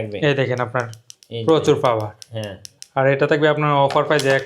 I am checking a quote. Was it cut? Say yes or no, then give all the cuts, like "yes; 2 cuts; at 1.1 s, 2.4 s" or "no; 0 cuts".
no; 0 cuts